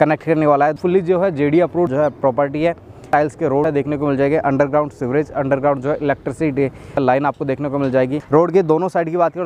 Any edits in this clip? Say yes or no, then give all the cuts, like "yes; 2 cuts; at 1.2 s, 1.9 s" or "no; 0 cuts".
yes; 5 cuts; at 0.8 s, 1.9 s, 3.4 s, 7.0 s, 8.2 s